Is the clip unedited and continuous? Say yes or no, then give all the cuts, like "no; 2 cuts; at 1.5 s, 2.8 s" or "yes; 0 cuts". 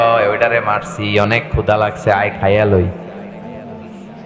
yes; 0 cuts